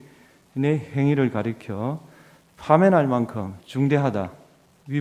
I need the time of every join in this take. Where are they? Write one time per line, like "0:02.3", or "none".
none